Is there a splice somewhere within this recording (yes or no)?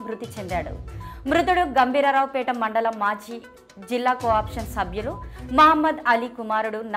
no